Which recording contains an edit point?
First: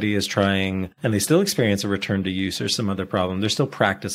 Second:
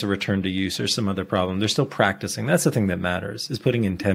first; 1 cut; at 0.9 s

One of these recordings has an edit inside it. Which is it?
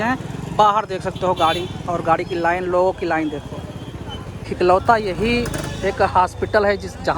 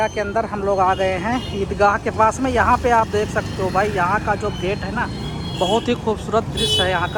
first; 1 cut; at 4.4 s

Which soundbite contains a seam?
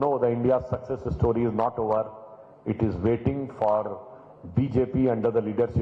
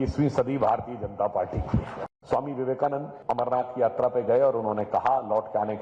second; 2 cuts; at 2.0 s, 3.1 s

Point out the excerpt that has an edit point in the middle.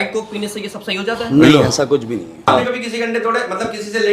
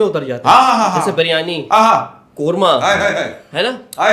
first; 1 cut; at 2.5 s

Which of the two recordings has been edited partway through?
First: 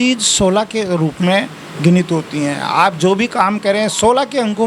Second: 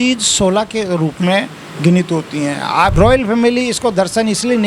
second; 1 cut; at 2.9 s

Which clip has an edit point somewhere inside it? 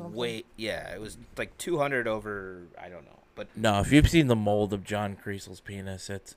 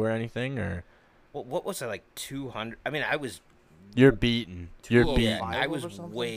first; 1 cut; at 3.4 s

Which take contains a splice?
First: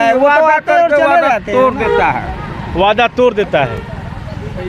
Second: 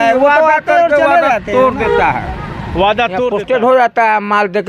second; 1 cut; at 3.3 s

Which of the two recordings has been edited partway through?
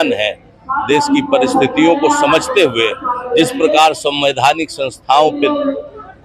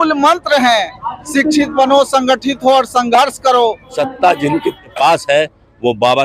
second; 2 cuts; at 3.9 s, 4.9 s

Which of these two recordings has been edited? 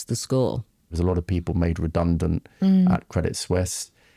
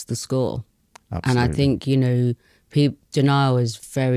first; 1 cut; at 0.9 s

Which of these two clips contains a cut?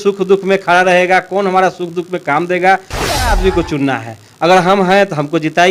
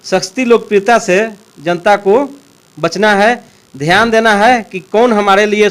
first; 1 cut; at 3.4 s

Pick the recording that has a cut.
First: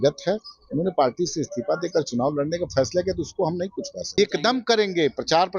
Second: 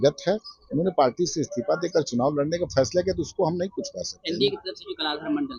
first; 1 cut; at 4.2 s

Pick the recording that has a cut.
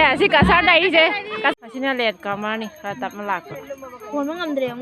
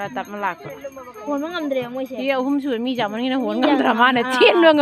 first; 1 cut; at 1.5 s

